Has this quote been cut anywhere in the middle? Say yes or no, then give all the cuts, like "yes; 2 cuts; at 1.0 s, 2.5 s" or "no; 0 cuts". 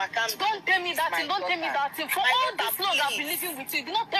no; 0 cuts